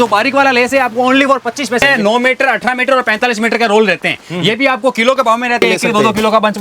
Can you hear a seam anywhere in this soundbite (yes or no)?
yes